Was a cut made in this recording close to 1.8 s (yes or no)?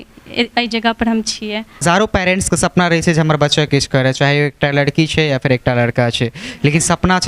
yes